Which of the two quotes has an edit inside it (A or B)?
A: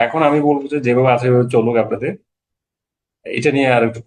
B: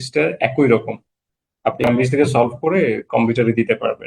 B